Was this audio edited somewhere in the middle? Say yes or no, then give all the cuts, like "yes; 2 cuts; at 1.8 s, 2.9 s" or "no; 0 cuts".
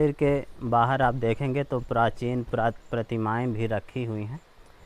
no; 0 cuts